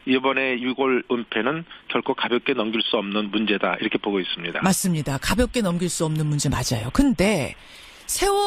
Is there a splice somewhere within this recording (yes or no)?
no